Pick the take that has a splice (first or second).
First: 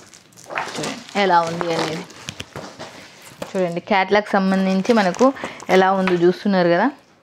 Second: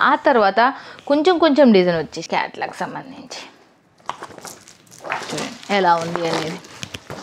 second